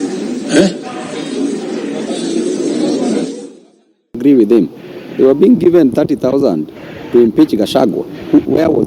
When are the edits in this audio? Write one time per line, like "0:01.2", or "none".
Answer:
0:03.8